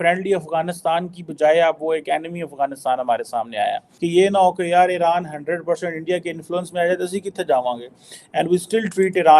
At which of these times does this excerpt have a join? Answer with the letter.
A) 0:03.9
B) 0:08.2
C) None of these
A